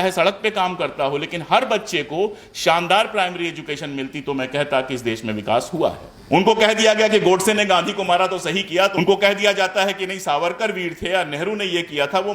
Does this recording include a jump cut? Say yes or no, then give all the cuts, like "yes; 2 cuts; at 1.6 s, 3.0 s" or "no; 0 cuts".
yes; 2 cuts; at 6.1 s, 8.9 s